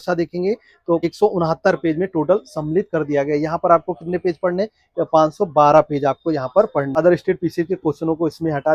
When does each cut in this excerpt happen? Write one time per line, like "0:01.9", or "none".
0:01.1
0:06.9